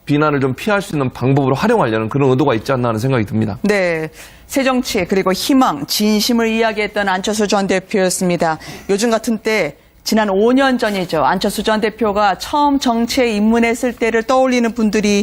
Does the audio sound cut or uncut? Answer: uncut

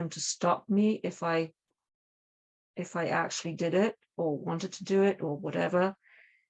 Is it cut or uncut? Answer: uncut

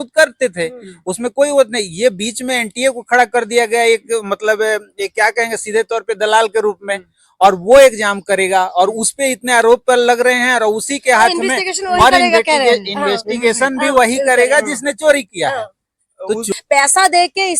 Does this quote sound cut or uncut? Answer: cut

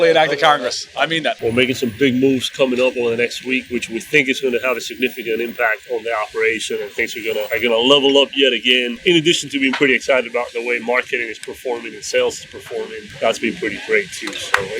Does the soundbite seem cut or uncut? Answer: cut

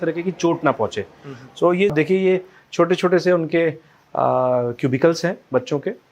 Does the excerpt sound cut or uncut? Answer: cut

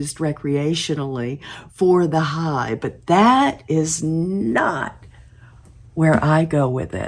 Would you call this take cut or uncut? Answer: uncut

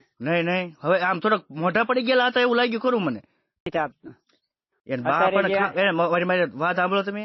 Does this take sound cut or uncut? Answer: cut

